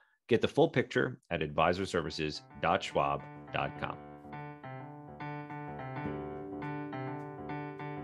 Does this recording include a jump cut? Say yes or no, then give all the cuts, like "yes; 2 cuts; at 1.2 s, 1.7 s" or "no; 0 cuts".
yes; 1 cut; at 4.0 s